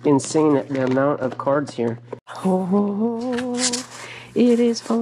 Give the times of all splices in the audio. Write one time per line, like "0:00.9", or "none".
0:02.3